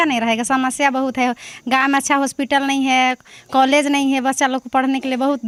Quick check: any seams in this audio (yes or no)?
no